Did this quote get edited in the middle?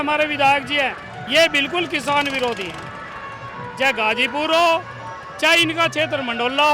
no; 0 cuts

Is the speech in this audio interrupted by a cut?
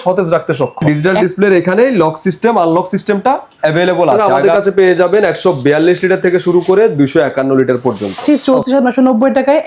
yes; 3 cuts; at 0.8 s, 4.3 s, 8.2 s

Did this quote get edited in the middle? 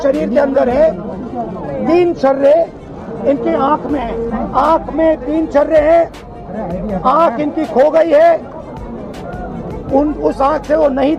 yes; 1 cut; at 4.3 s

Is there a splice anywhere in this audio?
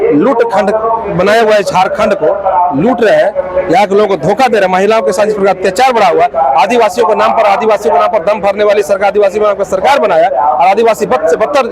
no; 0 cuts

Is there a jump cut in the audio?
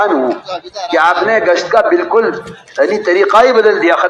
no; 0 cuts

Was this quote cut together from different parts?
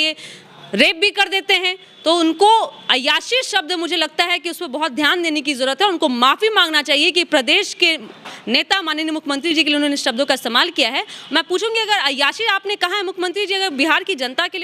no; 0 cuts

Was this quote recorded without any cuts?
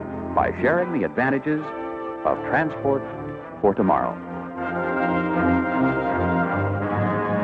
yes; 0 cuts

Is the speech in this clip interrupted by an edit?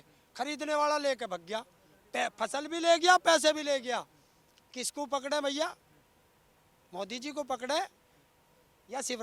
no; 0 cuts

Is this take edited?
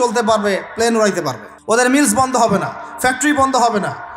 yes; 1 cut; at 1.5 s

